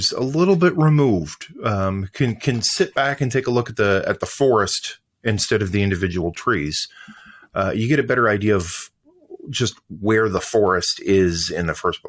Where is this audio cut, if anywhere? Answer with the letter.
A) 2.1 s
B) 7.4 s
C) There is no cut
C